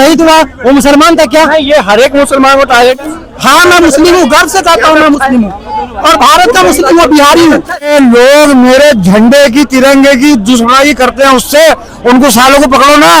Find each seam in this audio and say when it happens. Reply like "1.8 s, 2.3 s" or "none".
3.0 s, 7.9 s